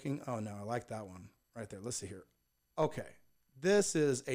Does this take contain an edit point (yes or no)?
no